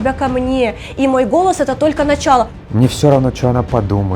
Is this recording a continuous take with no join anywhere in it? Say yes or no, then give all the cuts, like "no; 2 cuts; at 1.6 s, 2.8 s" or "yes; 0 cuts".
no; 1 cut; at 2.6 s